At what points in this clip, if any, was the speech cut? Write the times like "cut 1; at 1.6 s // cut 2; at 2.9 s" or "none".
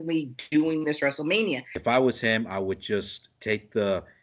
cut 1; at 1.7 s